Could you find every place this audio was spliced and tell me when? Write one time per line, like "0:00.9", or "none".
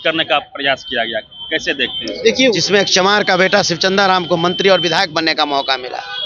0:02.5